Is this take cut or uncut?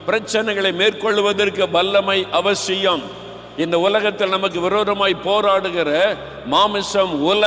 uncut